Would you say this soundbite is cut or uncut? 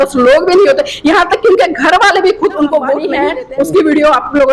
cut